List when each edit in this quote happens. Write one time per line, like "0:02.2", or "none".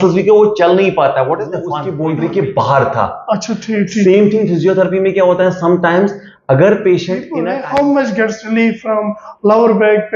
0:01.9
0:07.3